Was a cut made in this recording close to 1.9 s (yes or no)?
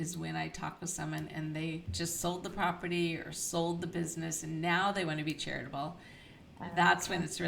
yes